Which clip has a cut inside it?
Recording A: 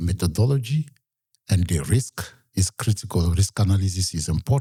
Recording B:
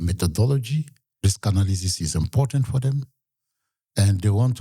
B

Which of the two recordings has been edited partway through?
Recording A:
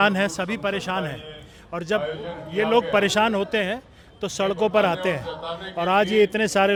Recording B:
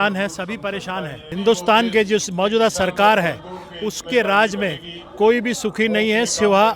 B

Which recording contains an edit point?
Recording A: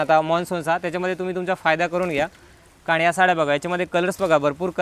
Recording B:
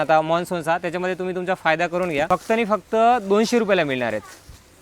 B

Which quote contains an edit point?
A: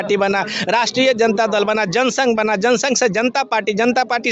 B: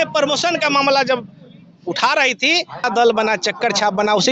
B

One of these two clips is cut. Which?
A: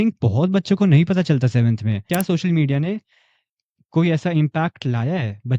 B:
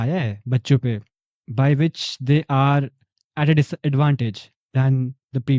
A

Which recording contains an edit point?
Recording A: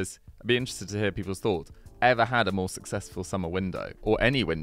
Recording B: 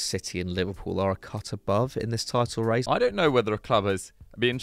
B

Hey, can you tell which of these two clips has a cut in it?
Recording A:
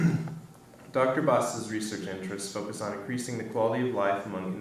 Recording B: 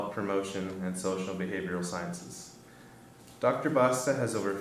B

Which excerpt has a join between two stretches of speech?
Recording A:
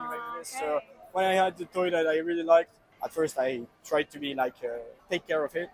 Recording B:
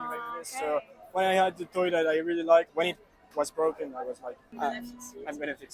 B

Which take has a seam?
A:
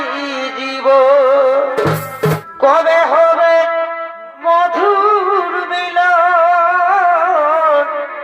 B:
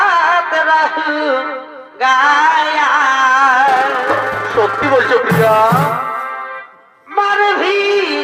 A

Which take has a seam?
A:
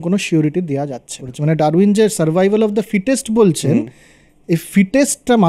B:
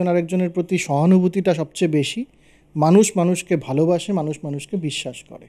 A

